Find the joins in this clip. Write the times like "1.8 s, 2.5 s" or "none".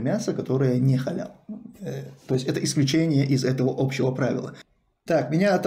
4.6 s